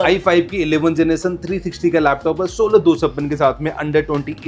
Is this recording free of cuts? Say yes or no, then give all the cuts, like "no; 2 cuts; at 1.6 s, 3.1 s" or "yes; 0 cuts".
yes; 0 cuts